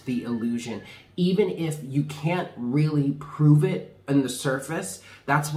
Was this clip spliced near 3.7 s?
no; 0 cuts

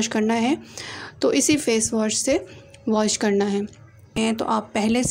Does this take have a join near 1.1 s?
no; 1 cut; at 3.9 s

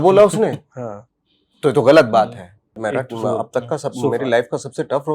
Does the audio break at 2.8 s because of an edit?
yes; 1 cut; at 2.8 s

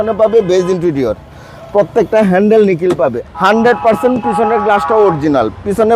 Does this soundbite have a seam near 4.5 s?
no; 1 cut; at 3.2 s

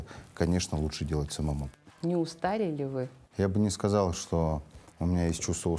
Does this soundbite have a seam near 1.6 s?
yes; 2 cuts; at 1.6 s, 3.2 s

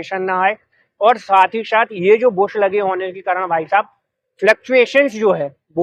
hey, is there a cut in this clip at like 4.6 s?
no; 0 cuts

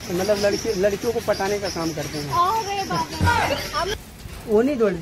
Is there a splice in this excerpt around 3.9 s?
yes; 1 cut; at 3.9 s

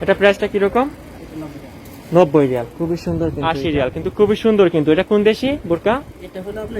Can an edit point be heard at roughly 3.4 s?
yes; 1 cut; at 3.4 s

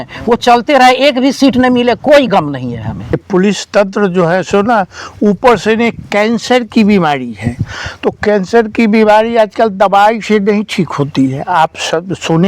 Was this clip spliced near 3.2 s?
yes; 1 cut; at 3.2 s

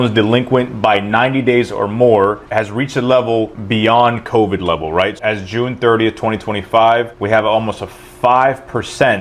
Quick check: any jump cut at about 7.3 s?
no; 0 cuts

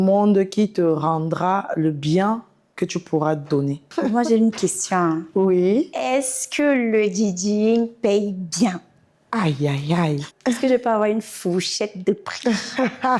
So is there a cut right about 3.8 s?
yes; 2 cuts; at 3.8 s, 10.3 s

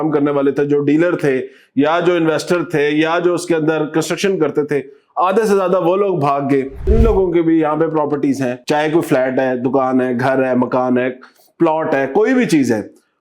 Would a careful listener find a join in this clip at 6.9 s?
yes; 1 cut; at 6.9 s

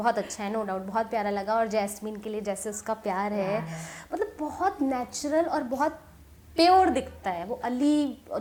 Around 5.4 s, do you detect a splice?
no; 0 cuts

